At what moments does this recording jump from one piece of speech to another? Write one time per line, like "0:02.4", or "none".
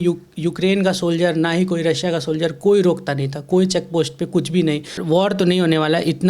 0:04.9